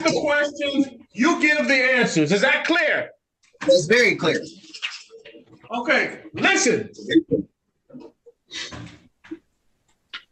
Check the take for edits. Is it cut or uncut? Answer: uncut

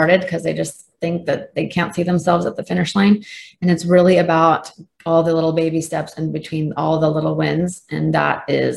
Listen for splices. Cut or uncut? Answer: uncut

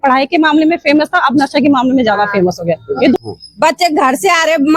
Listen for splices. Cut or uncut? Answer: cut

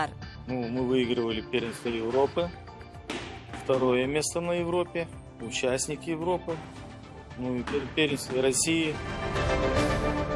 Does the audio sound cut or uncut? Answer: cut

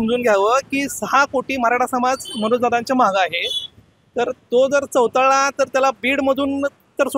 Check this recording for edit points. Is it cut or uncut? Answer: uncut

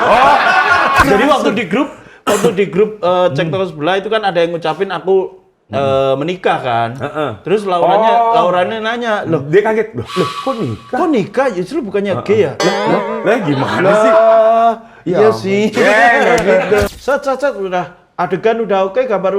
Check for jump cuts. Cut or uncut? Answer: cut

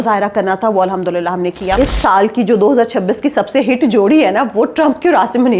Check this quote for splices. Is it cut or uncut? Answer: cut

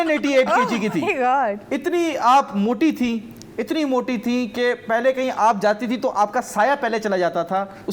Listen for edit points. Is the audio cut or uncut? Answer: uncut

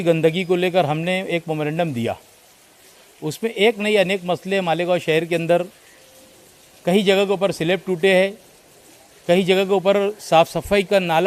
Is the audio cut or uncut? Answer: uncut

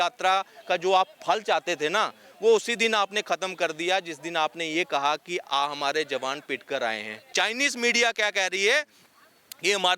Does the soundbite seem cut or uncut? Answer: cut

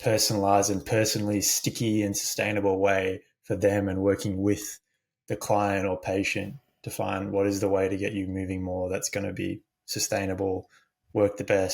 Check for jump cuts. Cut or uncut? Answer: uncut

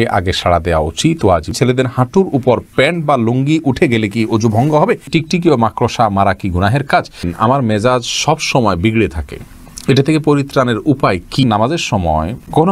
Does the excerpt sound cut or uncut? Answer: cut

